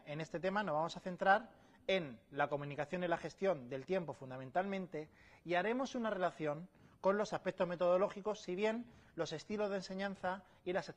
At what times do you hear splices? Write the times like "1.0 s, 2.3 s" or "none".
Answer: 7.3 s